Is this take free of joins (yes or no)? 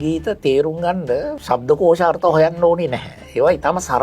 no